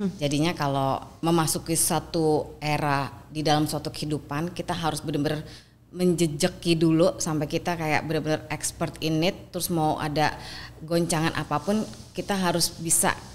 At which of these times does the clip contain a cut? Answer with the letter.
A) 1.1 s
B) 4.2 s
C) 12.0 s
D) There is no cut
A